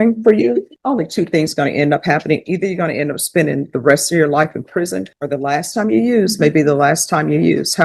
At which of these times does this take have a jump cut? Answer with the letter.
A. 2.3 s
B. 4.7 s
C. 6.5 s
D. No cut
D